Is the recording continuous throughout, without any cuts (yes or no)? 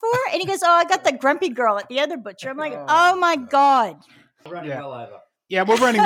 no